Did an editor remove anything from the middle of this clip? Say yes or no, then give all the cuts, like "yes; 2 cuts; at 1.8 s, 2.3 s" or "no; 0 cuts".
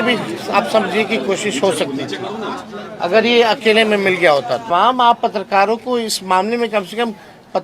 yes; 1 cut; at 4.7 s